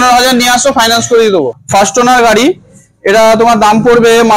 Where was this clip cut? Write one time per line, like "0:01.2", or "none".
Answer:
0:01.6